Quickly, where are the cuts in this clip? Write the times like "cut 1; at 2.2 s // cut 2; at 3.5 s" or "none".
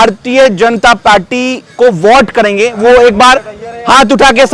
none